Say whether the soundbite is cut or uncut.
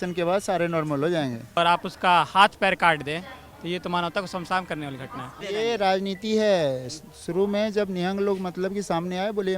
cut